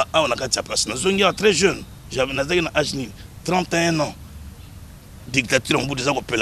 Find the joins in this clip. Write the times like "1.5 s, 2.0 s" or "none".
none